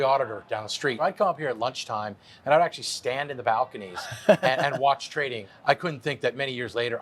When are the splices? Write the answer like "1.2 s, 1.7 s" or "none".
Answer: 1.0 s, 5.4 s